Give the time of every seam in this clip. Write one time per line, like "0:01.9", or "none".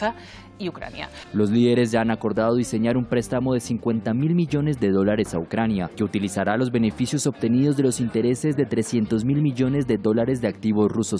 0:01.2